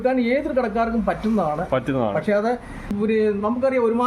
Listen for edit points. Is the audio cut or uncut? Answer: cut